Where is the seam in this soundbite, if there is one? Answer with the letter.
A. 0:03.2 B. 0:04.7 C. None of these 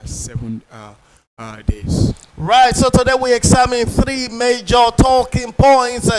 C